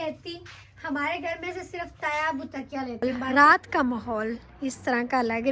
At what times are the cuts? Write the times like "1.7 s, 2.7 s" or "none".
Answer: 3.1 s